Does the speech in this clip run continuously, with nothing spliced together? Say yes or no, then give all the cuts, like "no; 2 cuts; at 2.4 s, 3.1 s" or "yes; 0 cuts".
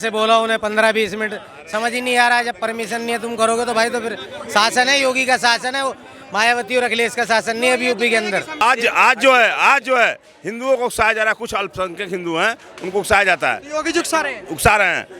no; 1 cut; at 8.6 s